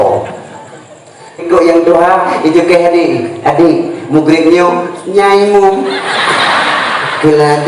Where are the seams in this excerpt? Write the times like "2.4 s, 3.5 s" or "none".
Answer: 1.4 s